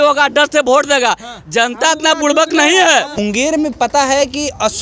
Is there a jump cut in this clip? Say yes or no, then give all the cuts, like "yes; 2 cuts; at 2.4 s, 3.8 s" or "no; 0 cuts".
yes; 1 cut; at 3.2 s